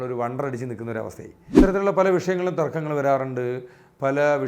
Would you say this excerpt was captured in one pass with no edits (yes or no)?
no